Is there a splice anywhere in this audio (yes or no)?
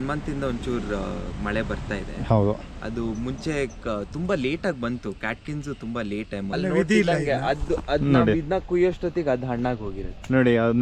yes